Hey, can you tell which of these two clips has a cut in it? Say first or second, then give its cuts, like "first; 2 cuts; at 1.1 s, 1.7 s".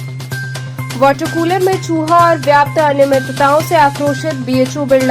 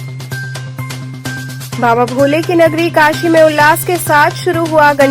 first; 1 cut; at 0.9 s